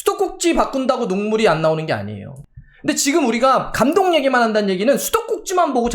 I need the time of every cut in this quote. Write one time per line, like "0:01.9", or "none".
0:02.3